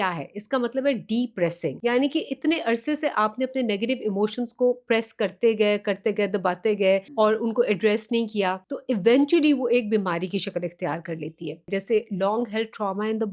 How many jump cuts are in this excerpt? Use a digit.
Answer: 4